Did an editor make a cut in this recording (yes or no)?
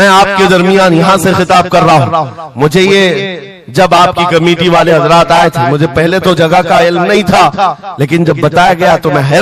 no